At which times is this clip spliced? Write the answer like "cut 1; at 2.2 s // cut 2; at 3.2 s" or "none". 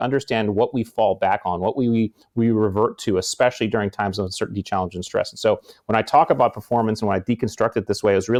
none